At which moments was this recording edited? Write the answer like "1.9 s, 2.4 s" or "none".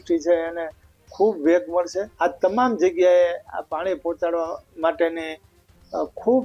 2.1 s